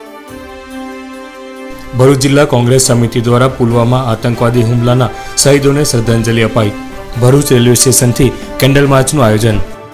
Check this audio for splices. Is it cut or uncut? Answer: cut